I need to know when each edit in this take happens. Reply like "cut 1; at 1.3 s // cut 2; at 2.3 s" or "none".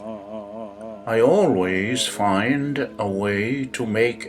cut 1; at 1.0 s